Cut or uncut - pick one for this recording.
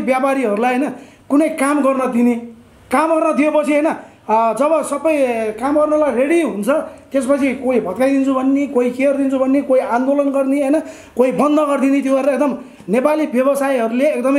uncut